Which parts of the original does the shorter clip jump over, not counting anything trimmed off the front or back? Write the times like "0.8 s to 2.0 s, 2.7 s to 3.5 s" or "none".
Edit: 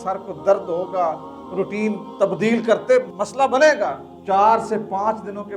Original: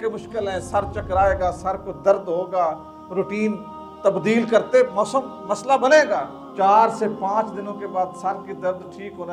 3.7 s to 3.9 s, 4.9 s to 5.4 s